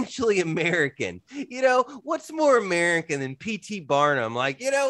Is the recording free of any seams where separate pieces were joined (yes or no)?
yes